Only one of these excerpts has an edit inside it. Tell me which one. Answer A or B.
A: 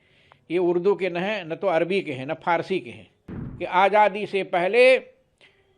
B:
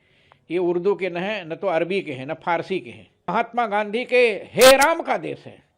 A